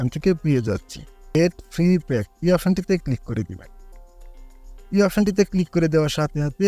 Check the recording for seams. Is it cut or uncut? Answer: cut